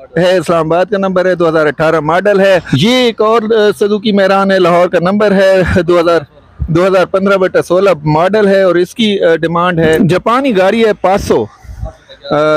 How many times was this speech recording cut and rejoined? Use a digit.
2